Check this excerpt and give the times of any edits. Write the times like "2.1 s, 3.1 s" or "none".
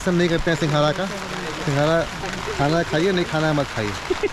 none